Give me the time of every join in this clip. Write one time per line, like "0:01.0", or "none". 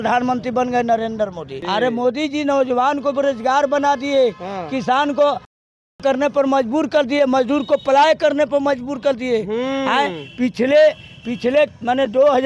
none